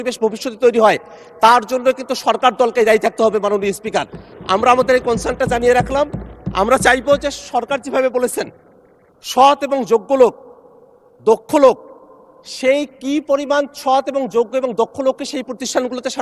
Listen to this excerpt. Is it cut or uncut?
uncut